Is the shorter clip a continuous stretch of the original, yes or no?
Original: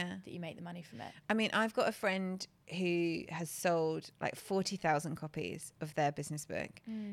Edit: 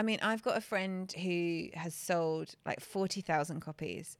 no